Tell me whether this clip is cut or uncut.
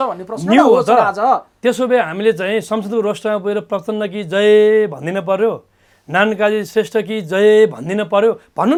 uncut